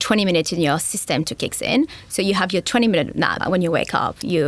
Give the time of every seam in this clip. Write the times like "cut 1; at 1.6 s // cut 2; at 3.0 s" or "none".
cut 1; at 3.4 s